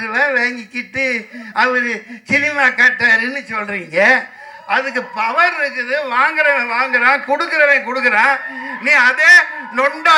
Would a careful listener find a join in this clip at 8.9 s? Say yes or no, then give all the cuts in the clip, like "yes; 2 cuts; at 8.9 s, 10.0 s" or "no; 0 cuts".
no; 0 cuts